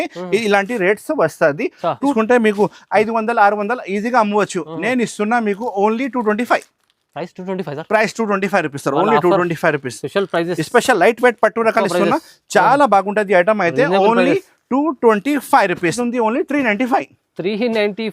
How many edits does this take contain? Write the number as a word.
two